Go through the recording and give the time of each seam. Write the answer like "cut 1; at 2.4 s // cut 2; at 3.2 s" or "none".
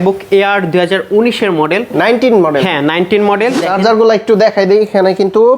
cut 1; at 3.7 s